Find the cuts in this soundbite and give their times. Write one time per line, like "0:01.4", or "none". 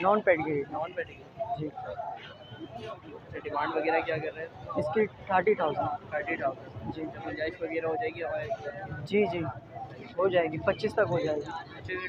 none